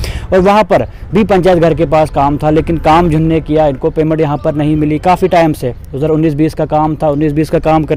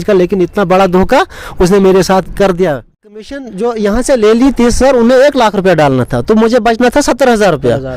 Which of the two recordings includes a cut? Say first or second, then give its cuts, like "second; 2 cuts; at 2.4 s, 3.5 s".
second; 1 cut; at 3.4 s